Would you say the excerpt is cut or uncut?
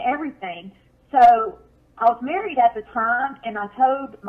uncut